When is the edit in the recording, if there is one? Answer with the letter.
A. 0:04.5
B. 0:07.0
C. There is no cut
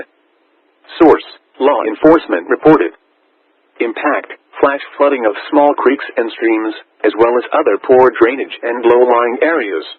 B